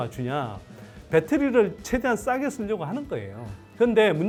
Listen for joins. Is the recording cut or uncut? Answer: uncut